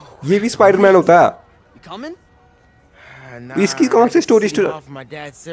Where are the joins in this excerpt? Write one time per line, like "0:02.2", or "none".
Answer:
none

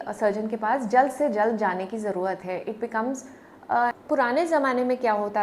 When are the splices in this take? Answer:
0:04.0

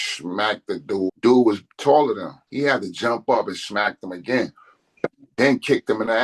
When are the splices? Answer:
0:01.1
0:02.4
0:05.2

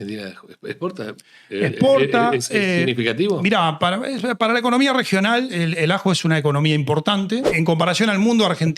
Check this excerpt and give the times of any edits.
0:07.5

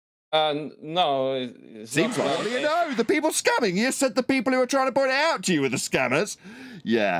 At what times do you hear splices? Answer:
0:02.5

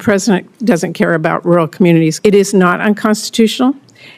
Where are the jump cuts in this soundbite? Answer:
0:02.1

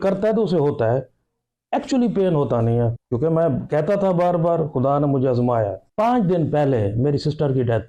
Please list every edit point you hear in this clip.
0:03.0
0:05.8

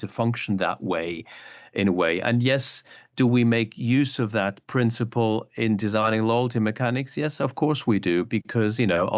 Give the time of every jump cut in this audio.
none

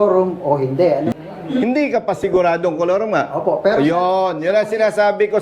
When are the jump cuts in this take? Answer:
0:01.1

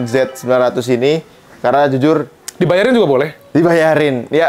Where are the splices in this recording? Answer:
none

